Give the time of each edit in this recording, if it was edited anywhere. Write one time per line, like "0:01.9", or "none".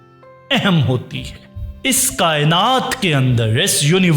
0:01.4